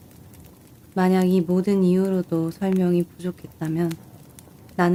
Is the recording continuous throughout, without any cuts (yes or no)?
yes